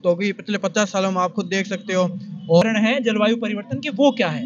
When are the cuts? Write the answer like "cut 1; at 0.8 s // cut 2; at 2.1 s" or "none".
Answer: cut 1; at 2.6 s